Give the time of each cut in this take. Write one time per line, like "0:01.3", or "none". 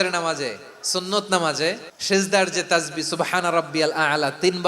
0:01.9